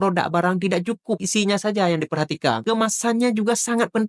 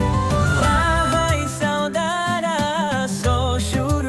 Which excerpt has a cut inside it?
first; 2 cuts; at 1.2 s, 2.6 s

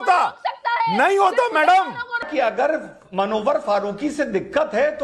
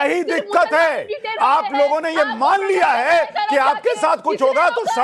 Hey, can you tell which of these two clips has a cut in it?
first; 1 cut; at 2.3 s

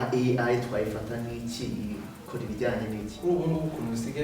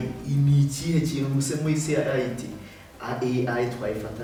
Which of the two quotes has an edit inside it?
first; 1 cut; at 3.2 s

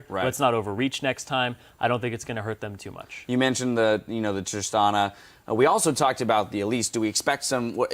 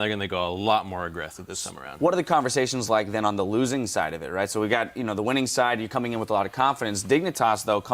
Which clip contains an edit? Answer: first; 1 cut; at 6.5 s

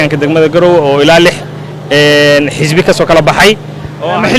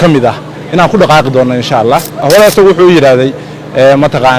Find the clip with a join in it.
second; 1 cut; at 2.2 s

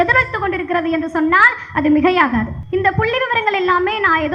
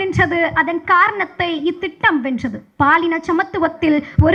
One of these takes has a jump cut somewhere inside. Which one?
first; 1 cut; at 2.6 s

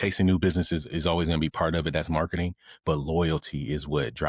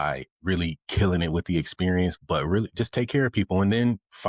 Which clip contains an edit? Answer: second; 1 cut; at 2.2 s

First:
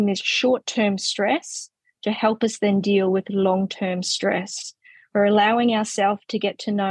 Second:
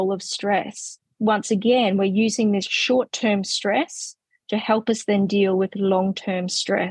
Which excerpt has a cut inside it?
second; 1 cut; at 1.1 s

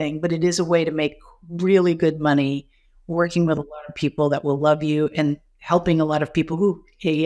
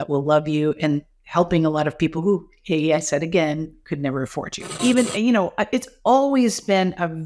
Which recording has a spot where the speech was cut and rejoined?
second; 1 cut; at 4.7 s

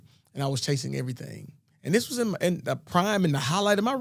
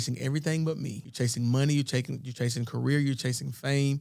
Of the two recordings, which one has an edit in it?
second; 1 cut; at 1.0 s

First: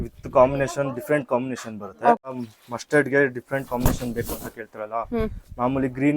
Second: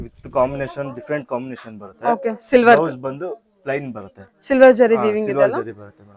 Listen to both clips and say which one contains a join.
first; 1 cut; at 2.3 s

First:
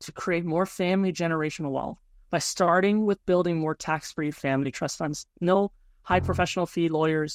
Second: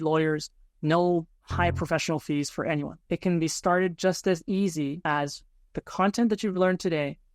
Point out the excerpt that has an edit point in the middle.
second; 1 cut; at 5.0 s

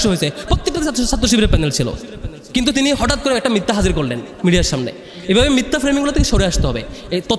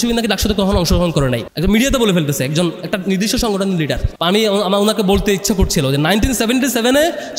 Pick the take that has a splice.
second; 2 cuts; at 1.5 s, 4.1 s

